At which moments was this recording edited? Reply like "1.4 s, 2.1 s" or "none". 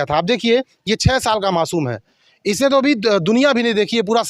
none